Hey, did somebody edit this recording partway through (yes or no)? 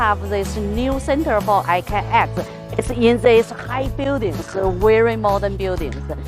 yes